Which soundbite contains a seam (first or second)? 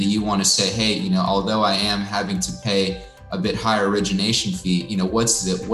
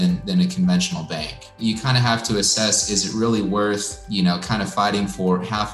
second